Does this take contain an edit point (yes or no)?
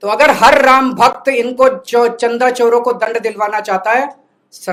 no